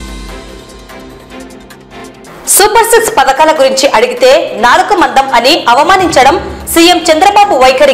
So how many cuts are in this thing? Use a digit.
1